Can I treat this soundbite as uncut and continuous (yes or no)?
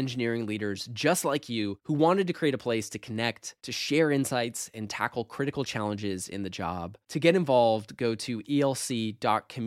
yes